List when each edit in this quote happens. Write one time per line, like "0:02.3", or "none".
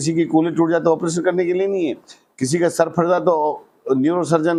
none